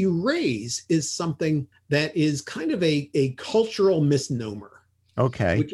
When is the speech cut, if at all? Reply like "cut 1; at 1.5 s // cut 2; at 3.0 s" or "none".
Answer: none